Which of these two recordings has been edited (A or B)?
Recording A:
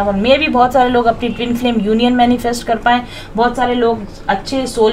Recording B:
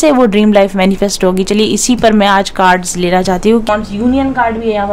B